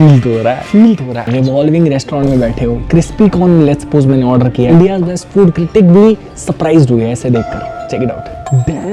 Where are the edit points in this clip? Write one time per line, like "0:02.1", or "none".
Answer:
0:01.2
0:04.6